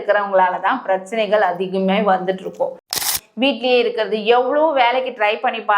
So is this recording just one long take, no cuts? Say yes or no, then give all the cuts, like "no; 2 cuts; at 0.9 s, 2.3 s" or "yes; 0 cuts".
no; 1 cut; at 3.0 s